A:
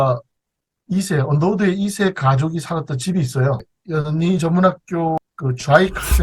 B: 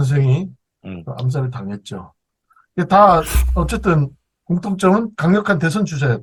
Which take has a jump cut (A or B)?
A